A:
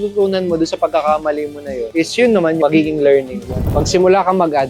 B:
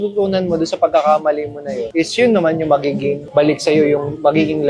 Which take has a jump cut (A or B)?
A